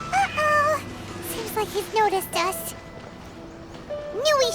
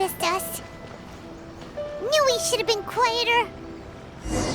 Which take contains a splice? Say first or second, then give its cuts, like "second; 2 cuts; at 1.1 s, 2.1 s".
second; 1 cut; at 3.5 s